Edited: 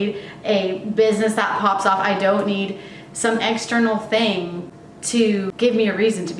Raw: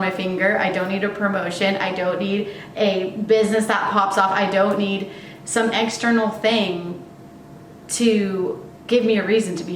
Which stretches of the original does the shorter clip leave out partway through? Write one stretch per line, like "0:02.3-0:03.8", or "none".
0:07.7-0:08.7